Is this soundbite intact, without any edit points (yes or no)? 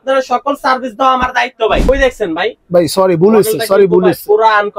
no